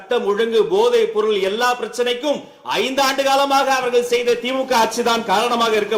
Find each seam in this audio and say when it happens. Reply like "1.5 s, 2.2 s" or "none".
none